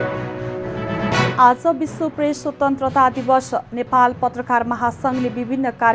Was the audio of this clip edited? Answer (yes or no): no